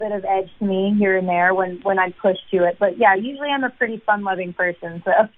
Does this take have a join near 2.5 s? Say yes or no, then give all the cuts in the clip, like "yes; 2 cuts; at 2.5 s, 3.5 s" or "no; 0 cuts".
no; 0 cuts